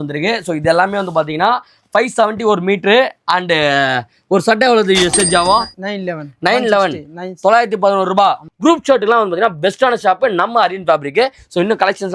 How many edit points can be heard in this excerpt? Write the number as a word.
one